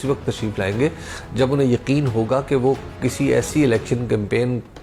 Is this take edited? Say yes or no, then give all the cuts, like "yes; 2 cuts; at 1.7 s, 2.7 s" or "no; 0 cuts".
no; 0 cuts